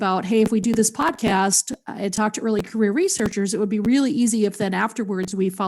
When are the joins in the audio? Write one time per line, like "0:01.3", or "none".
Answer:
0:02.7